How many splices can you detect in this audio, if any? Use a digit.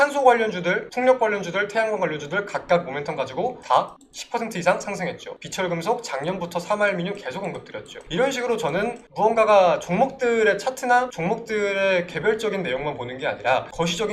0